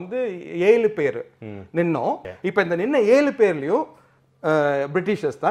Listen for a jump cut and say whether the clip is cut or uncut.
cut